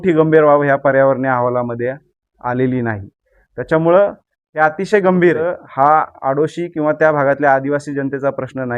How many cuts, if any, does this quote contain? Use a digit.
1